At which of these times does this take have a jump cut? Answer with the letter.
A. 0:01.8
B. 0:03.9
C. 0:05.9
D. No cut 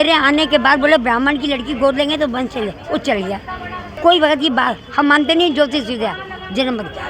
D